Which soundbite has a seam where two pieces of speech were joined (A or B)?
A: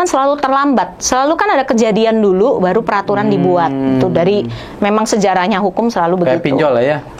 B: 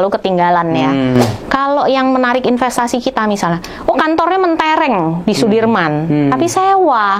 B